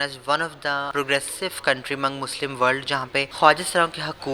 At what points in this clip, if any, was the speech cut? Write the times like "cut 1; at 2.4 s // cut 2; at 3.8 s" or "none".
cut 1; at 0.9 s // cut 2; at 3.3 s

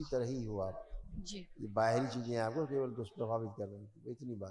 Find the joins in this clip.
none

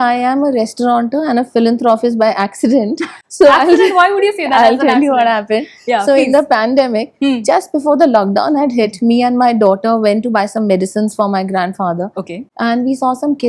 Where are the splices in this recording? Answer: none

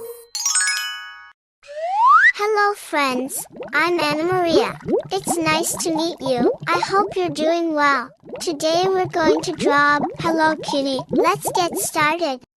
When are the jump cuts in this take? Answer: cut 1; at 10.2 s // cut 2; at 11.2 s

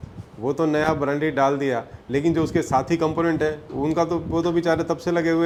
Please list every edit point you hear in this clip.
none

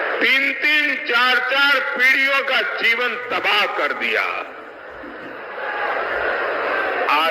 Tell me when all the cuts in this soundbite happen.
none

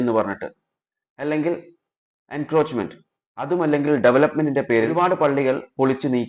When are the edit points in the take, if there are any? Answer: cut 1; at 4.9 s

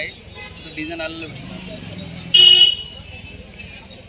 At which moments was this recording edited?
none

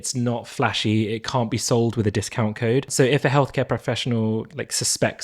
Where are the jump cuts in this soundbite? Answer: cut 1; at 2.9 s

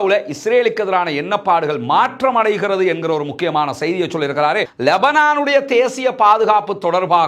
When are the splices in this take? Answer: cut 1; at 4.7 s

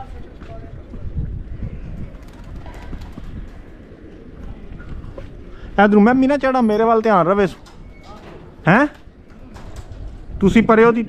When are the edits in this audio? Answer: cut 1; at 4.4 s

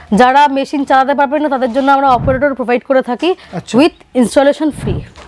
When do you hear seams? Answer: none

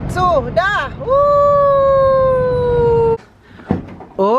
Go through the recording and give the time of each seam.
cut 1; at 3.2 s

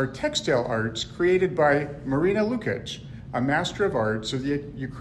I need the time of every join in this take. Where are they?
none

